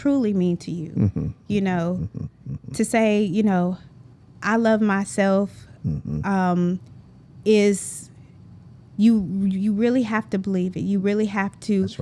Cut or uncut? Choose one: uncut